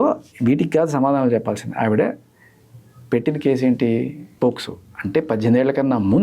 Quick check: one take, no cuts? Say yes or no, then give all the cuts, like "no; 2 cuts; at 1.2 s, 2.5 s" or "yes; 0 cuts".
no; 1 cut; at 4.2 s